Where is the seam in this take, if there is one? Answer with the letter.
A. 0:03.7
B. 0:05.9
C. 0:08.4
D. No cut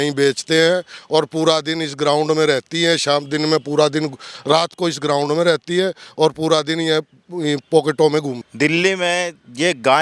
C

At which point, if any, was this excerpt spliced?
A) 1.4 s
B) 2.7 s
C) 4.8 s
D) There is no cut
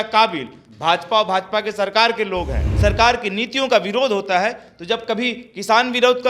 B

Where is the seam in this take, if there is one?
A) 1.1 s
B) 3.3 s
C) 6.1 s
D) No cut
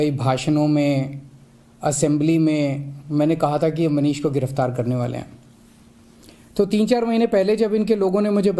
B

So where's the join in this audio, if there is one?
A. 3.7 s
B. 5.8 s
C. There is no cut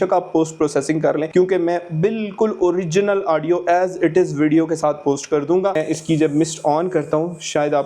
B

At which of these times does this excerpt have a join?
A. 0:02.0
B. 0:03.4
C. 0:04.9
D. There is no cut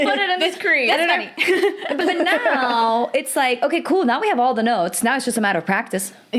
A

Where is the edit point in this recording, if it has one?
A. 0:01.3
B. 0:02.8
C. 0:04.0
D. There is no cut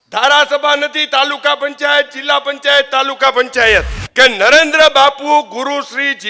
C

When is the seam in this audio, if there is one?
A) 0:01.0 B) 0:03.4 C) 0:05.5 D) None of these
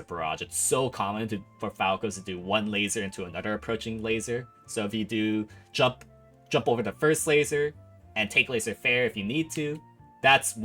D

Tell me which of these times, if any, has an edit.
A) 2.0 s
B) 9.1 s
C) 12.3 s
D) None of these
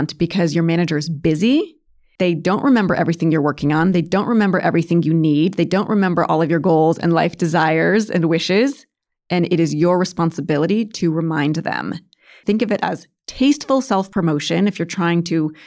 C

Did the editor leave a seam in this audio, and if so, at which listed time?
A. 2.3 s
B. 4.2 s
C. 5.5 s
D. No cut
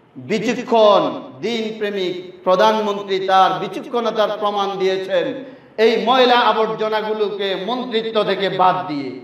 D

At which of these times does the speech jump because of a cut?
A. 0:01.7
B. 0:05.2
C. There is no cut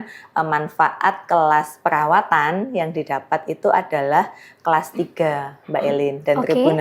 C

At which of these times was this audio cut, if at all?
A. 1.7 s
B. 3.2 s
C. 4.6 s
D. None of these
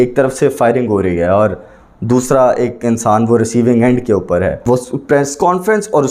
C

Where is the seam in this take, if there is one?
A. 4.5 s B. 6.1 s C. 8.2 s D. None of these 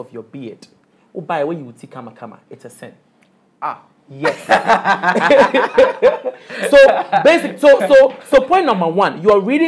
D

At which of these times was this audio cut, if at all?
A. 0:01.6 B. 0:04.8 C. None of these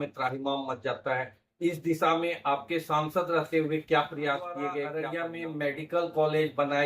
B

